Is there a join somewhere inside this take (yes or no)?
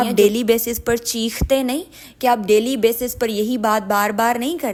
no